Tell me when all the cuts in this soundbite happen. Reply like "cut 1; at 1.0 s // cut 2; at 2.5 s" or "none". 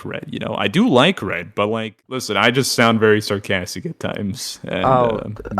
cut 1; at 1.9 s